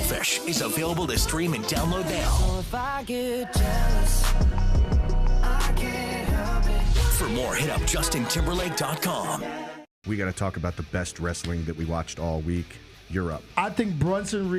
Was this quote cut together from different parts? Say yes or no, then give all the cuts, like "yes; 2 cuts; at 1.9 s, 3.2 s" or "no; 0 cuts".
yes; 1 cut; at 9.9 s